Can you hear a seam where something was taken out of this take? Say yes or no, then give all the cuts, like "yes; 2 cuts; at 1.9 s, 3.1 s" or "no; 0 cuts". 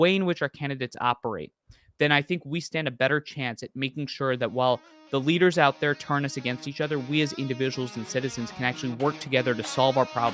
no; 0 cuts